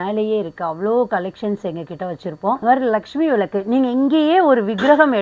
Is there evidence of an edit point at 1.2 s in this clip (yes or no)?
no